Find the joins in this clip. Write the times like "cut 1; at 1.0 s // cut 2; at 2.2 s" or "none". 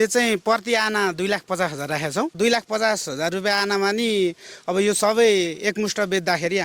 cut 1; at 2.3 s